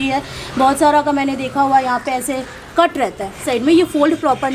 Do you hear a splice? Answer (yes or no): yes